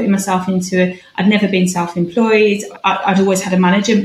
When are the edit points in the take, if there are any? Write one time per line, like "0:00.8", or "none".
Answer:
none

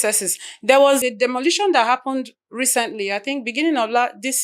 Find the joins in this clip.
0:01.0

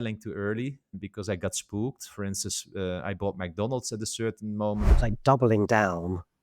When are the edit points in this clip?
0:05.0

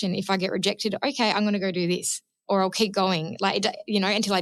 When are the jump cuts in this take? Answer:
none

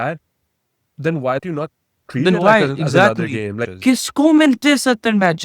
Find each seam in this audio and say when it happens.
0:01.4
0:03.5

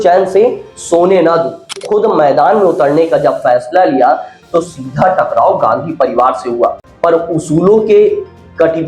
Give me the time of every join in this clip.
0:01.8
0:06.9

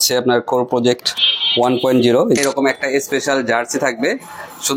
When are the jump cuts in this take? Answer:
0:02.4

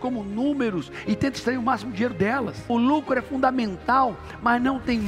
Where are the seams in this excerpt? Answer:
0:02.6

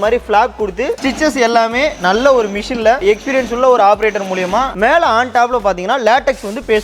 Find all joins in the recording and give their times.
0:00.9
0:04.7

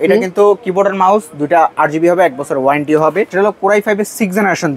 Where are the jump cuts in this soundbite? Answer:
0:03.3

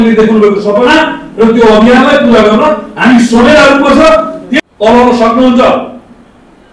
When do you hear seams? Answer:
0:04.4

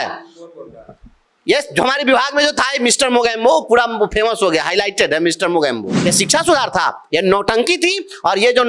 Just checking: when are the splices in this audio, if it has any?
0:06.0

